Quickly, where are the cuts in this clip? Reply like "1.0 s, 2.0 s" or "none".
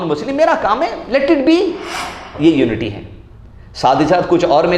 2.3 s